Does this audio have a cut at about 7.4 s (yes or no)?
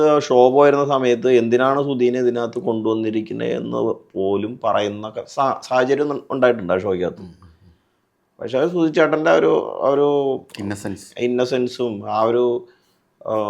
no